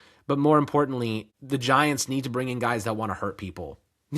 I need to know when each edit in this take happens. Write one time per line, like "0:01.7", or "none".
0:01.3